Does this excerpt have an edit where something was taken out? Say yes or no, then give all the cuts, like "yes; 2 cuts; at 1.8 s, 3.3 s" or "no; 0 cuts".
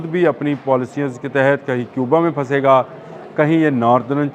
no; 0 cuts